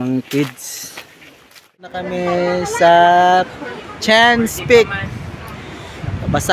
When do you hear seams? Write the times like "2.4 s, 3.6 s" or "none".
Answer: 1.9 s